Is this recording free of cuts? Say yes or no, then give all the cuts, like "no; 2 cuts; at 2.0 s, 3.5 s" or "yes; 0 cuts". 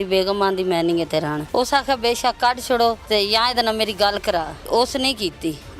no; 3 cuts; at 1.4 s, 3.0 s, 4.6 s